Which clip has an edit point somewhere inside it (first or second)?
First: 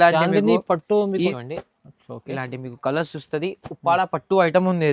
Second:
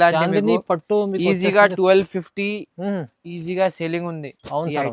first